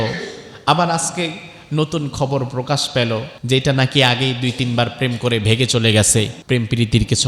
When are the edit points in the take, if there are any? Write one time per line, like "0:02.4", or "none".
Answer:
0:03.3
0:06.4